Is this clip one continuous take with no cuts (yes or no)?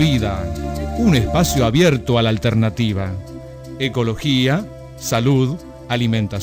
yes